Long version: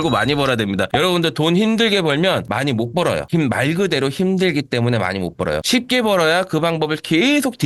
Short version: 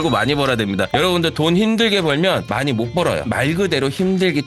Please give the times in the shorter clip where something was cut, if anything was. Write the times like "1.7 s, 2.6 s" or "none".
3.3 s